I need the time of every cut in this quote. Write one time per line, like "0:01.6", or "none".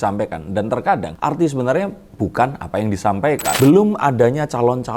0:01.1
0:03.6